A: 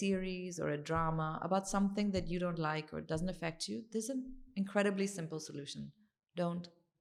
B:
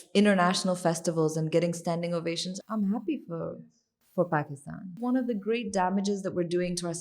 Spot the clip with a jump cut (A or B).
B